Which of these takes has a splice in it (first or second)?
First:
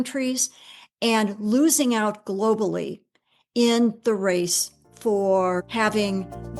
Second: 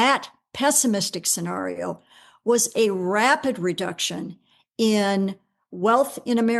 first